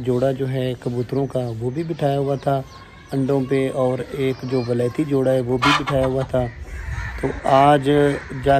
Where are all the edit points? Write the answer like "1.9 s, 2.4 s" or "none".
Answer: none